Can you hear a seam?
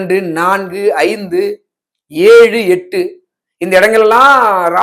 no; 0 cuts

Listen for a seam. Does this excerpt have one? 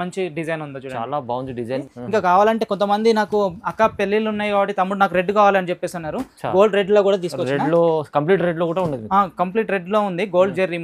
yes; 1 cut; at 1.9 s

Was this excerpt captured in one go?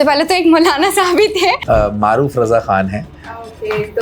no; 1 cut; at 1.6 s

